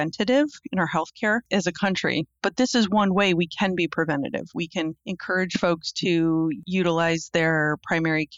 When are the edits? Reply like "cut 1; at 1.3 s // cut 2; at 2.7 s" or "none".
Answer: none